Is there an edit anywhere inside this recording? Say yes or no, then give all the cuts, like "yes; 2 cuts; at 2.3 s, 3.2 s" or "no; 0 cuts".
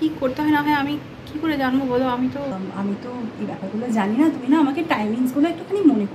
yes; 1 cut; at 2.5 s